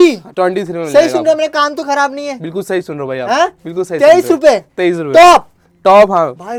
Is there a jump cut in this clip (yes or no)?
no